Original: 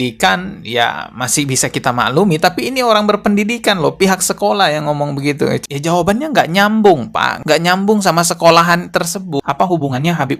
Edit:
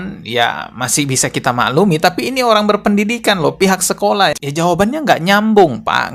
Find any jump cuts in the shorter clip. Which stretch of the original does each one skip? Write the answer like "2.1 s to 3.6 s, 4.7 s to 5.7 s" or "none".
4.8 s to 5.7 s